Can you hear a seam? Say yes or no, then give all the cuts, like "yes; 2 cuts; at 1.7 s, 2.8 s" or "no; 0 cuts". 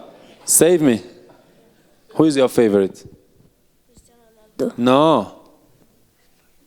no; 0 cuts